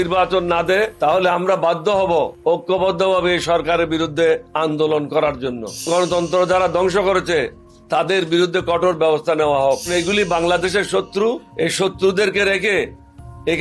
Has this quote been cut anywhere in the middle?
yes; 6 cuts; at 0.9 s, 2.3 s, 4.5 s, 5.8 s, 9.9 s, 11.5 s

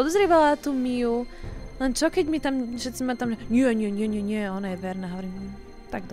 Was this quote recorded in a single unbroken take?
yes; 0 cuts

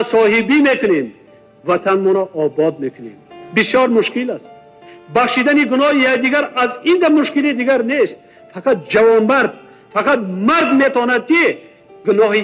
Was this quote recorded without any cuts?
yes; 0 cuts

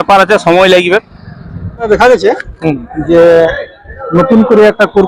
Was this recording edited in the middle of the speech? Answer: yes; 1 cut; at 1.9 s

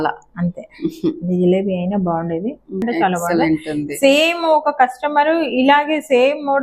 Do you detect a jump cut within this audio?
yes; 1 cut; at 2.8 s

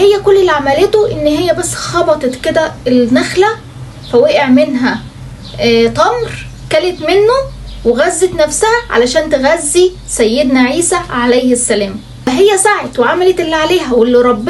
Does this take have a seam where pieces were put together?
yes; 1 cut; at 12.1 s

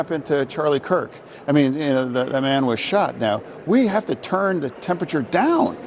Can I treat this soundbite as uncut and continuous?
yes; 0 cuts

